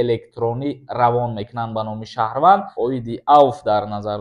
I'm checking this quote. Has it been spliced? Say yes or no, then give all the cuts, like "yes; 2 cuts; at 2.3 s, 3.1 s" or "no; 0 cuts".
yes; 1 cut; at 2.7 s